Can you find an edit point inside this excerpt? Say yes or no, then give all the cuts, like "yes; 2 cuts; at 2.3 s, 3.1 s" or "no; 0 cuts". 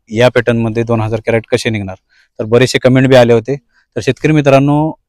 no; 0 cuts